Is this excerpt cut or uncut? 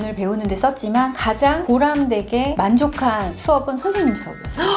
uncut